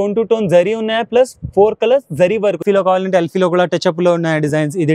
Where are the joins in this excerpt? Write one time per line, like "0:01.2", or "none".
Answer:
0:02.6